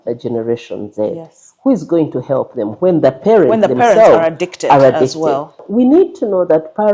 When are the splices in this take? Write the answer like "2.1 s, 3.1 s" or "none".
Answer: 5.6 s